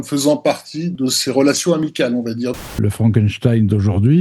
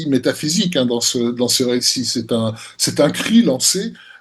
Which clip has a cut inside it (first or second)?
first